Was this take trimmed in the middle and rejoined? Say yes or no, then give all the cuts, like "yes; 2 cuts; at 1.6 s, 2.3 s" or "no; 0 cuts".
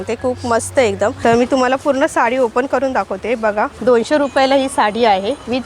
yes; 2 cuts; at 1.2 s, 3.7 s